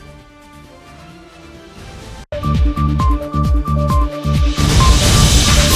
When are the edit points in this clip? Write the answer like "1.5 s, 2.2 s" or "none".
2.1 s